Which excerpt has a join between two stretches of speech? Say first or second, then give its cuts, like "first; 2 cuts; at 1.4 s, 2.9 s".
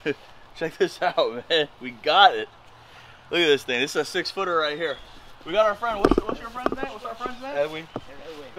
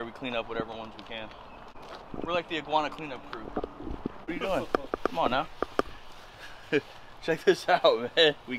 second; 2 cuts; at 1.7 s, 4.2 s